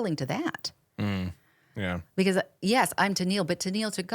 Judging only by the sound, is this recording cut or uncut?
uncut